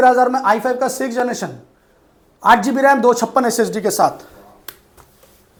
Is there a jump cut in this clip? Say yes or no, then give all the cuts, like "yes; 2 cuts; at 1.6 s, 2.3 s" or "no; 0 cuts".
no; 0 cuts